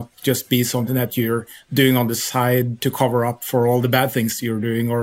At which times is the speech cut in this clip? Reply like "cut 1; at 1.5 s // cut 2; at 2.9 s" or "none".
none